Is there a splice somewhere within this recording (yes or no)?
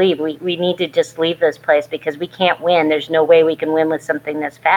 no